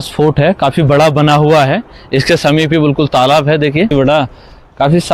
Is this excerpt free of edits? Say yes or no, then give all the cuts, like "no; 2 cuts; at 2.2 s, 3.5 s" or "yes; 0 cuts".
no; 1 cut; at 3.9 s